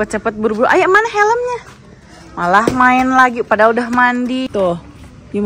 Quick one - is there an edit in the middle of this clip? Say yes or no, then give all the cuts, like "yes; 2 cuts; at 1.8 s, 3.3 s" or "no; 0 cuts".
yes; 1 cut; at 4.5 s